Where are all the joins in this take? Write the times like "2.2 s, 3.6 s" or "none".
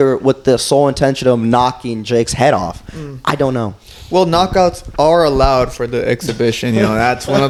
none